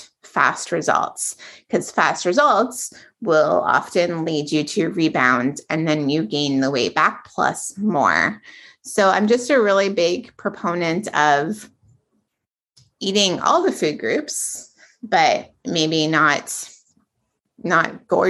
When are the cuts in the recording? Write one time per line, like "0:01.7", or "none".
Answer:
none